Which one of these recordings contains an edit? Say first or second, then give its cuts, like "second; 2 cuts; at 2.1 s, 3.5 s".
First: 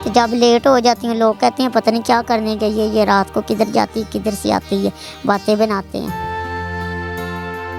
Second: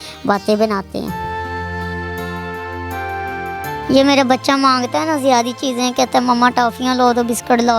second; 1 cut; at 3.8 s